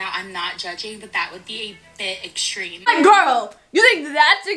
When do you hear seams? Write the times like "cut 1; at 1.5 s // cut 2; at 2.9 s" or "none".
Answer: cut 1; at 2.9 s